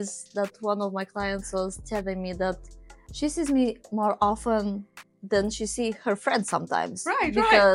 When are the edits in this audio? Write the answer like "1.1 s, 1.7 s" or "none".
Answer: none